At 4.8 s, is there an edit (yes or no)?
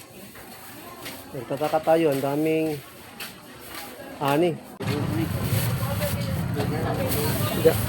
yes